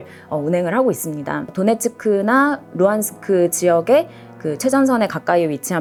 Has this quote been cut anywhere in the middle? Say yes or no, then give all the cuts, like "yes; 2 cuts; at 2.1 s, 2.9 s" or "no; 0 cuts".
no; 0 cuts